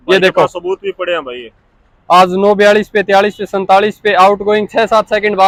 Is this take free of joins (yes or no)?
yes